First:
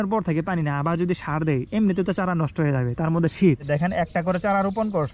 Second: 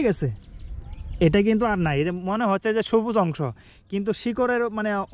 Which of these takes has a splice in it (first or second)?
first